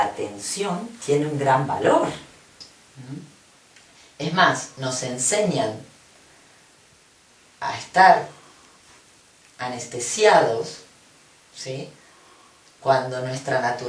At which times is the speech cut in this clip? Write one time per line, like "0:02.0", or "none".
0:02.6